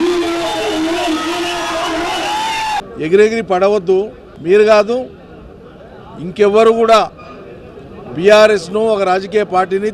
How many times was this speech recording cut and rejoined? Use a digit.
1